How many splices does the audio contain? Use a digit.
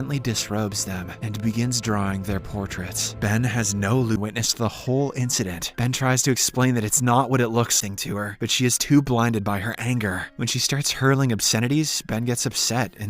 2